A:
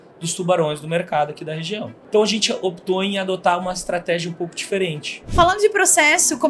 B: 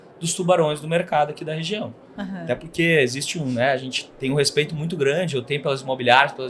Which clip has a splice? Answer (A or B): A